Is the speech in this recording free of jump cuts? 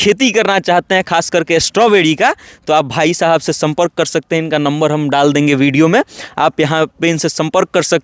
yes; 0 cuts

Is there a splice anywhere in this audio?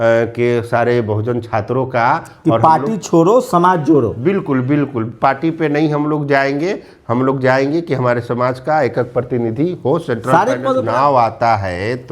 yes; 1 cut; at 10.8 s

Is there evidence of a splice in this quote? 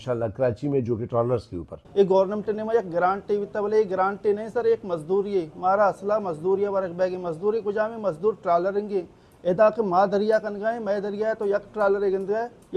yes; 1 cut; at 1.7 s

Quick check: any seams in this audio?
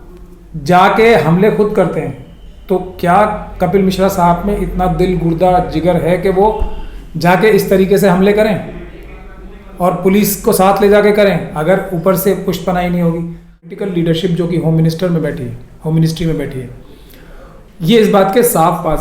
yes; 1 cut; at 13.7 s

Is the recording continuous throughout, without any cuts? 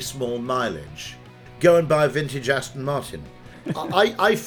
no; 2 cuts; at 1.4 s, 3.5 s

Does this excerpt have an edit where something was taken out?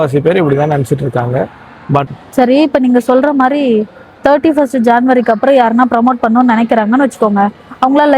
yes; 1 cut; at 2.1 s

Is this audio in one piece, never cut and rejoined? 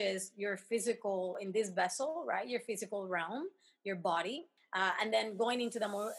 no; 2 cuts; at 1.4 s, 4.6 s

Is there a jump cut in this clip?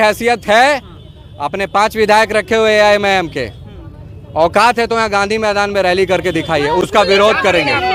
no; 0 cuts

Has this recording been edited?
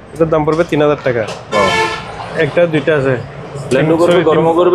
no; 0 cuts

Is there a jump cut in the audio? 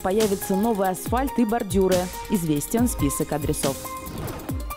no; 0 cuts

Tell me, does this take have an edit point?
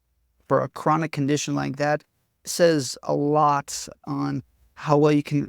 yes; 1 cut; at 4.0 s

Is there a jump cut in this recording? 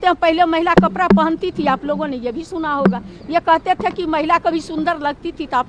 no; 0 cuts

